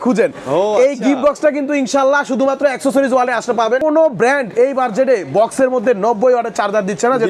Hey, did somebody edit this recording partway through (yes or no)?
yes